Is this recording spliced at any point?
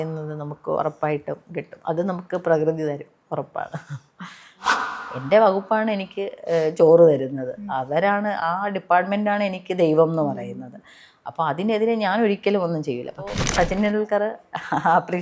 yes; 2 cuts; at 4.7 s, 13.4 s

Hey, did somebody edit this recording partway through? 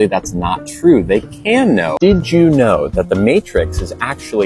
yes; 1 cut; at 1.9 s

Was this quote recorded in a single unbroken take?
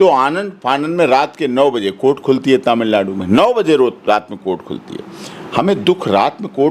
yes; 0 cuts

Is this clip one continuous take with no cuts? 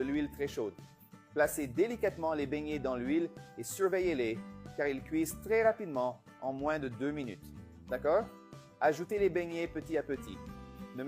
yes; 0 cuts

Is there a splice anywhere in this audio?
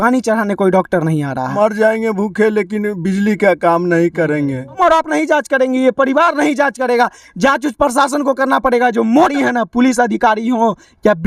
yes; 3 cuts; at 1.5 s, 4.8 s, 9.3 s

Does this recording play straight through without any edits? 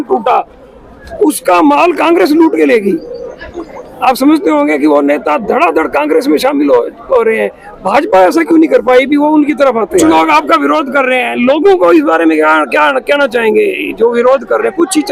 no; 1 cut; at 10.0 s

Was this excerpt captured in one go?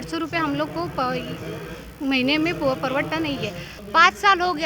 no; 1 cut; at 3.7 s

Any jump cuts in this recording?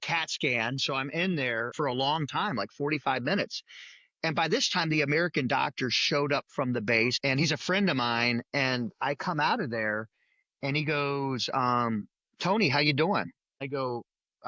yes; 3 cuts; at 1.7 s, 7.2 s, 13.4 s

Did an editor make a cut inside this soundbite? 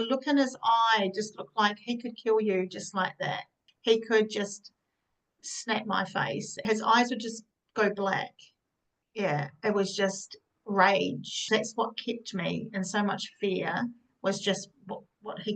yes; 3 cuts; at 3.7 s, 6.6 s, 11.4 s

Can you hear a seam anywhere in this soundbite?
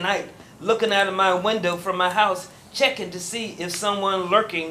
no; 0 cuts

